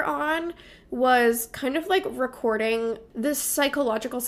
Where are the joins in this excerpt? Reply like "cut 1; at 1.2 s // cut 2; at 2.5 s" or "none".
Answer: cut 1; at 3.1 s